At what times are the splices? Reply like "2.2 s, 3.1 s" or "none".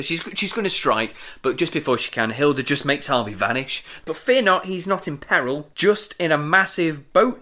4.0 s, 5.7 s